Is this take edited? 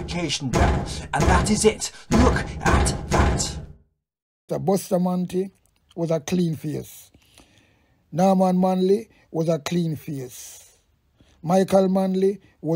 yes; 1 cut; at 4.4 s

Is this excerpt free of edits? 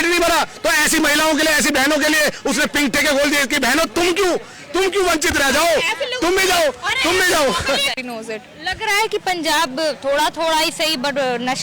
no; 1 cut; at 8.1 s

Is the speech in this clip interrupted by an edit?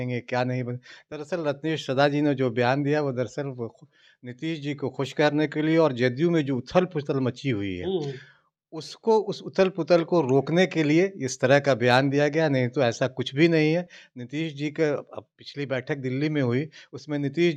no; 0 cuts

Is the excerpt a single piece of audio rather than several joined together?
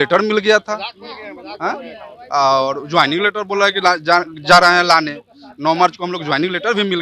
yes; 0 cuts

